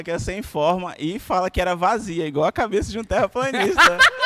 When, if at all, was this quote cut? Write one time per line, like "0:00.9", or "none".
none

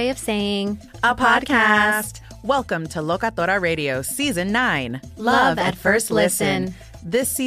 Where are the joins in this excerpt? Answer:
none

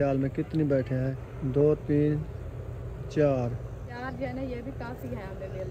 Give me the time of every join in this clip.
0:01.3
0:03.9

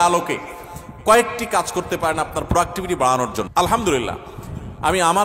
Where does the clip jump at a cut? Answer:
0:03.4

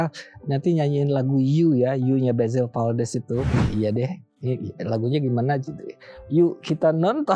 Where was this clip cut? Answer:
0:03.6

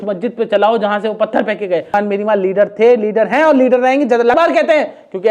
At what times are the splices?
0:01.9
0:04.3

